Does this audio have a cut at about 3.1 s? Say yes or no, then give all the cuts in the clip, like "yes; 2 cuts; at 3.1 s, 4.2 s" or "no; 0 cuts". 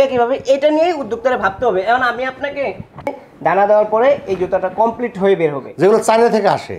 yes; 1 cut; at 3.1 s